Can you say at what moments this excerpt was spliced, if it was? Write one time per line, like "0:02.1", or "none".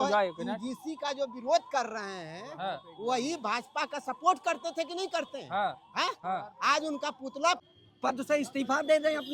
0:07.6